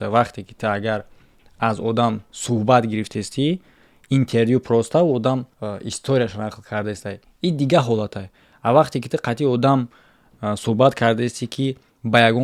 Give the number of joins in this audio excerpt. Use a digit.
0